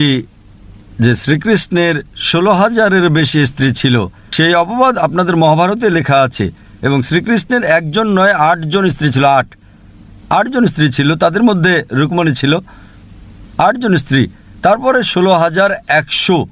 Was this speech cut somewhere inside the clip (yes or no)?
no